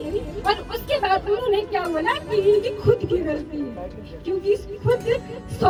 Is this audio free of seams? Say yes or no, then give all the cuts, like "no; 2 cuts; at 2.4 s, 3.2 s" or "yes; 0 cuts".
yes; 0 cuts